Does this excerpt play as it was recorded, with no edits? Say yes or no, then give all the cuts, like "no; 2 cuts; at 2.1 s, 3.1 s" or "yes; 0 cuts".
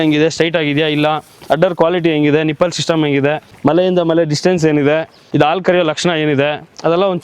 no; 2 cuts; at 3.5 s, 5.2 s